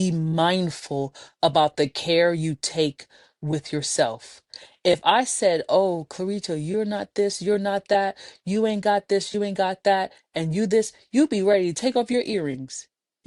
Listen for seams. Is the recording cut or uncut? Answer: uncut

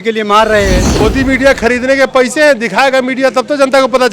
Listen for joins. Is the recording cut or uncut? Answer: cut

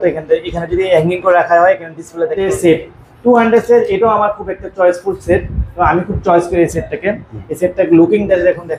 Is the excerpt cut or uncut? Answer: cut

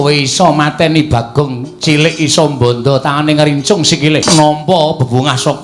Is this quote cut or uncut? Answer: cut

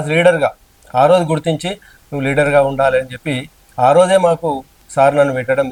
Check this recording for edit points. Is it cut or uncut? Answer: uncut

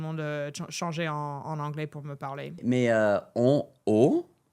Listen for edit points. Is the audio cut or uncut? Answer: cut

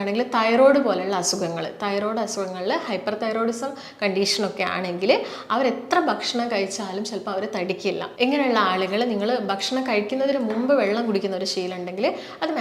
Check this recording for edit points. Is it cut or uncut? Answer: cut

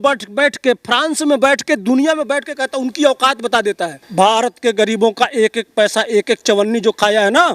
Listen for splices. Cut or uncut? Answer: cut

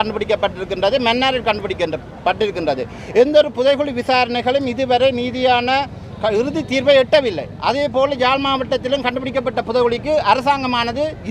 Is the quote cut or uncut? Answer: uncut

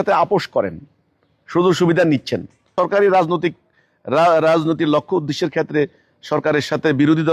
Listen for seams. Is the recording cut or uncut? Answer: cut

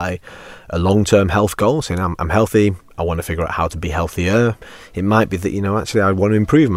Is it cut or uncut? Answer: cut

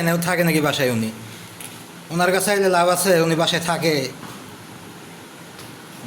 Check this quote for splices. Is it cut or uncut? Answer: uncut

